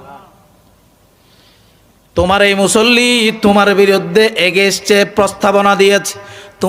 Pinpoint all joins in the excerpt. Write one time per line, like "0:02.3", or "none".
none

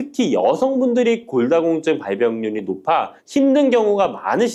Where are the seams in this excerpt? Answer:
none

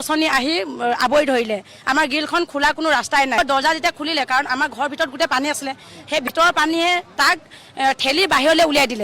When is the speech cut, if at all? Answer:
0:03.4

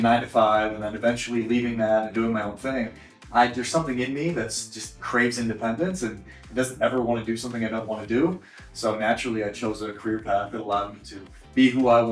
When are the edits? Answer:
none

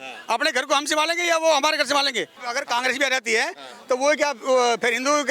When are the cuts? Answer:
0:02.4

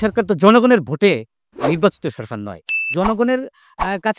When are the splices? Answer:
0:02.9

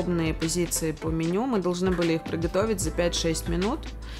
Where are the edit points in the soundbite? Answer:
none

